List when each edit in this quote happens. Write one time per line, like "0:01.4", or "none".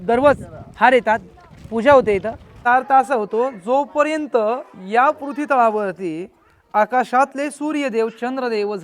0:02.5